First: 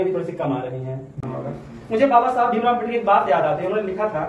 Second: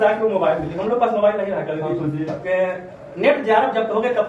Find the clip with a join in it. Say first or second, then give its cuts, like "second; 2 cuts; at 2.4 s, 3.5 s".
first; 1 cut; at 1.3 s